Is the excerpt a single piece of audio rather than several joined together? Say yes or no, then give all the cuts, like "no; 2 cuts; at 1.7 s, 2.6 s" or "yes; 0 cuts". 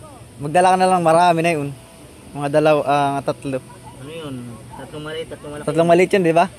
yes; 0 cuts